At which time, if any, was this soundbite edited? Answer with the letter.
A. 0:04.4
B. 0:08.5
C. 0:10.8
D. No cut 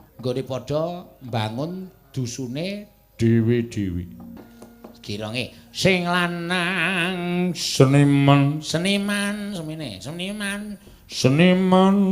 A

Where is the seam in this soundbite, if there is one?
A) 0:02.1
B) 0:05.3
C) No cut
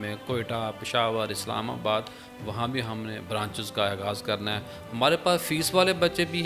C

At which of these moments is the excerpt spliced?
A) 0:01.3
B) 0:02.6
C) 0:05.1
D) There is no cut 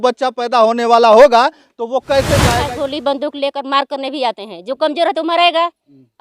B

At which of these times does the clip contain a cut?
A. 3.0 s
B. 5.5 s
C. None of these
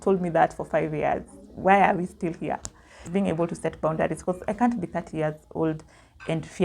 A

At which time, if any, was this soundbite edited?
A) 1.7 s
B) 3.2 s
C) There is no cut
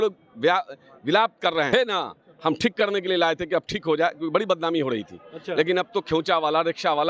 A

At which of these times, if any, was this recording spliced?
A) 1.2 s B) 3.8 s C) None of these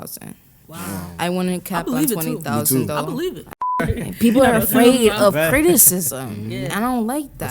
B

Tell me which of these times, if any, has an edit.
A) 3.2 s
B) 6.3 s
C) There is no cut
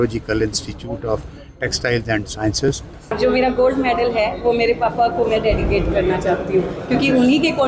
A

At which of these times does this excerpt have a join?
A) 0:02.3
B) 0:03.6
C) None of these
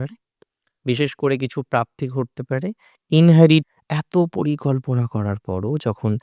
B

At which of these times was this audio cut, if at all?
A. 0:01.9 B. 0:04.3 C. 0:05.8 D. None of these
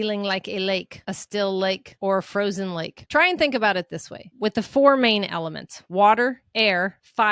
D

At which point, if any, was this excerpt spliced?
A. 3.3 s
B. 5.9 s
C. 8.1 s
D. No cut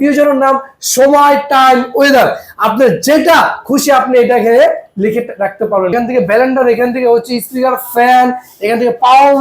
B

